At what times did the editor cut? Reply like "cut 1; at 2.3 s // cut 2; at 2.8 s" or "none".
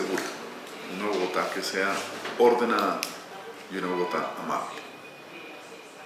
none